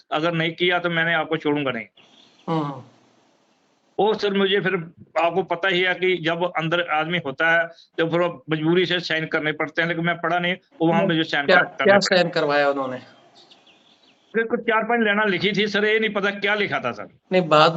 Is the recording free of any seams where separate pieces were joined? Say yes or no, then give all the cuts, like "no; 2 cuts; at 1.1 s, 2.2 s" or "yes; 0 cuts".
yes; 0 cuts